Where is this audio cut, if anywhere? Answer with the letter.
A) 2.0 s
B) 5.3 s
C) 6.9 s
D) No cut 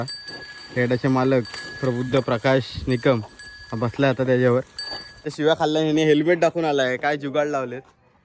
B